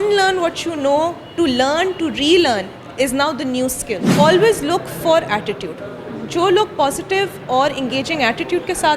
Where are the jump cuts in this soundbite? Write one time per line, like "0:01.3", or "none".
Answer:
0:04.1